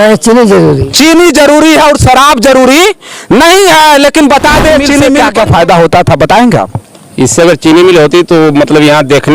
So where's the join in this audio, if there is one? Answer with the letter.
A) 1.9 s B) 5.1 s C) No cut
B